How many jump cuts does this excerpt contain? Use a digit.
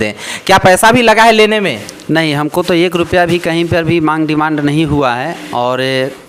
0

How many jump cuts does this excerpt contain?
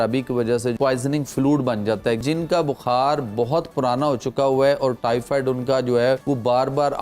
3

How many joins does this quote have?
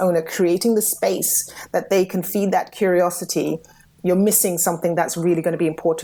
1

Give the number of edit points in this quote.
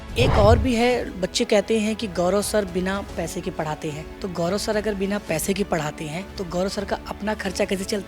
2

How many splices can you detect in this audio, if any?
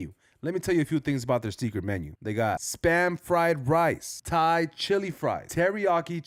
0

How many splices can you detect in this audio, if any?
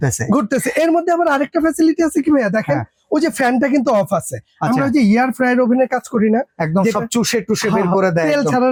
0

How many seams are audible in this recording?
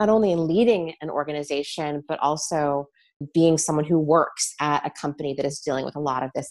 0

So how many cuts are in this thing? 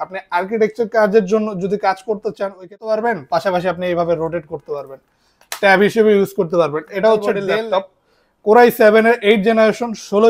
2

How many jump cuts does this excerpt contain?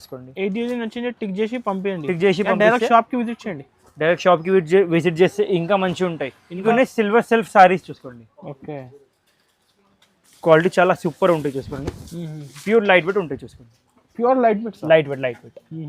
1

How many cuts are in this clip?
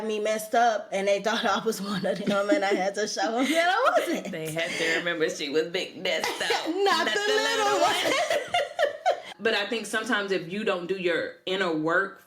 1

